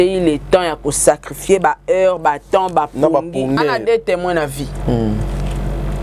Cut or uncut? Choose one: cut